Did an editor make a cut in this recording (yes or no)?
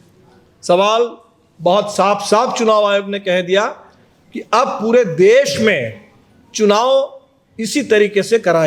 no